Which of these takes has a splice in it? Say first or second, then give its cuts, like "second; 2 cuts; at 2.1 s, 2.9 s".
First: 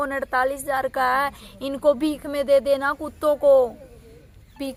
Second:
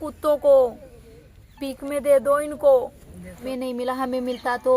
second; 1 cut; at 3.4 s